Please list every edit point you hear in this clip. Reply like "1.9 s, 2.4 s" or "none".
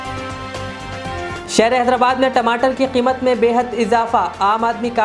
1.3 s

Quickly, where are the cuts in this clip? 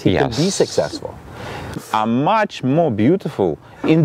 1.8 s

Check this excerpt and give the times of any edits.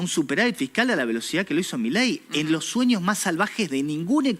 none

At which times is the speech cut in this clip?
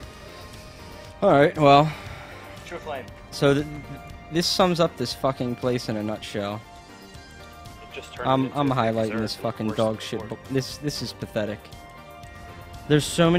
8.9 s

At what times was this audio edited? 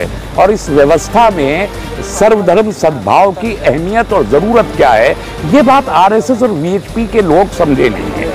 none

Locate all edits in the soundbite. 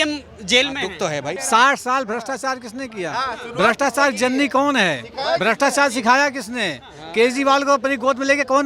1.4 s

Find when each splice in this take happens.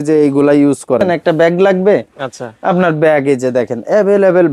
1.2 s

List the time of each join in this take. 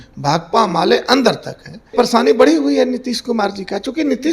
1.9 s

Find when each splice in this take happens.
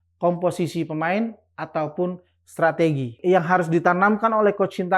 3.2 s

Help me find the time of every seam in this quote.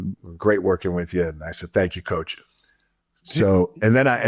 none

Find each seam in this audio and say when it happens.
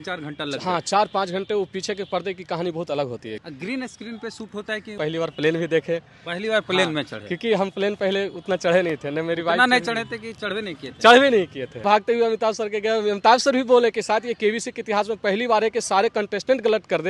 3.4 s, 5.0 s, 11.8 s

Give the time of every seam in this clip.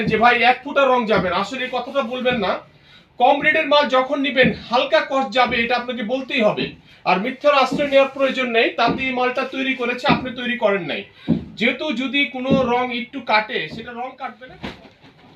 14.2 s

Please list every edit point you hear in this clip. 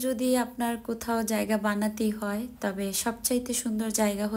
none

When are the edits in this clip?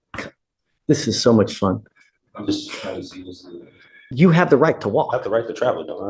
4.0 s

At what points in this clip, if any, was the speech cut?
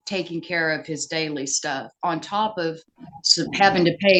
none

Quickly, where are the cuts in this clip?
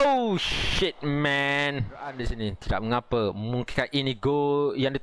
2.2 s

